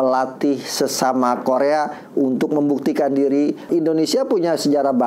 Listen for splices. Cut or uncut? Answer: cut